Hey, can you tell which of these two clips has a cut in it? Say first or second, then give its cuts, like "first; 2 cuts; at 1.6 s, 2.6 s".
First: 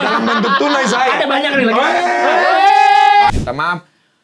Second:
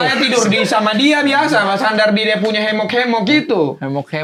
first; 1 cut; at 3.3 s